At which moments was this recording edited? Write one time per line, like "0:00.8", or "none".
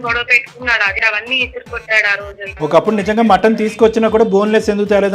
0:01.0
0:02.5